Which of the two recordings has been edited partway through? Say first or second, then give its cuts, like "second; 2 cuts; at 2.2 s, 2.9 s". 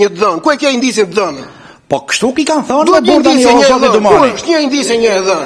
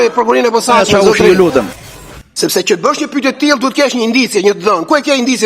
second; 1 cut; at 1.8 s